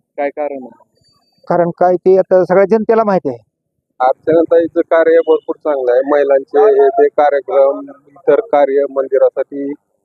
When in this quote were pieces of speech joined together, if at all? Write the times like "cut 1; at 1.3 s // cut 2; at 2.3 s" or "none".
cut 1; at 3.9 s